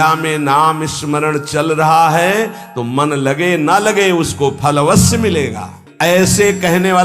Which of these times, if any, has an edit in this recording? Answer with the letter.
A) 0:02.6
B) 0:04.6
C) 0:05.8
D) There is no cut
C